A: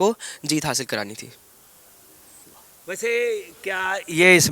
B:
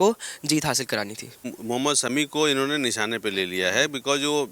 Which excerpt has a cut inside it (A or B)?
B